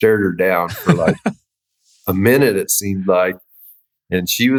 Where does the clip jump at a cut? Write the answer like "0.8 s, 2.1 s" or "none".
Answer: none